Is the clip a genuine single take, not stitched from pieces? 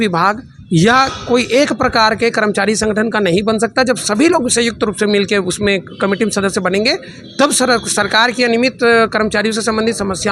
yes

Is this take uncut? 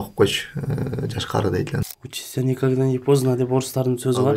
no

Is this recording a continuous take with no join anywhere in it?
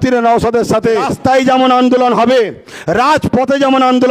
no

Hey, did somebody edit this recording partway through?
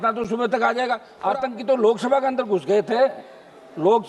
yes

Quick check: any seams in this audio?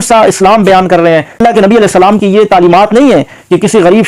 yes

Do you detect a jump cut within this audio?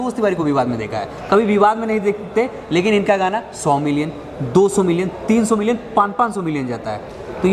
no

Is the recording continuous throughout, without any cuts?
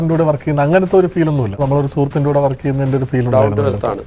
no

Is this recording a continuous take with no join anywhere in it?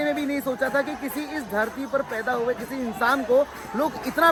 yes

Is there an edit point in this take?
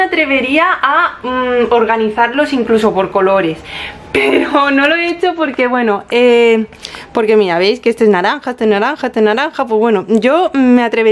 no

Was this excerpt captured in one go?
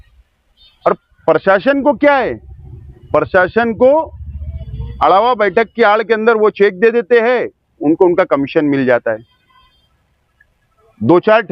yes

